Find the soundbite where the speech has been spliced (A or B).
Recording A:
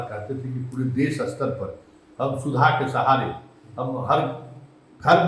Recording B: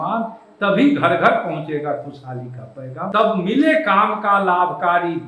B